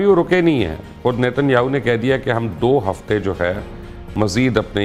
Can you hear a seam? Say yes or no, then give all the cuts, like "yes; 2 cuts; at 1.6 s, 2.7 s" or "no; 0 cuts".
no; 0 cuts